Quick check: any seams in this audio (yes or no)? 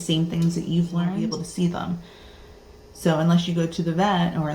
yes